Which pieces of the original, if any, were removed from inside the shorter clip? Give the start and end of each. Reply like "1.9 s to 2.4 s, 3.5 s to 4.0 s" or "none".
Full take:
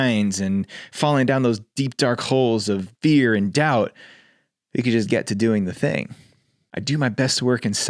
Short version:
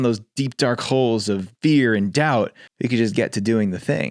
4.0 s to 4.6 s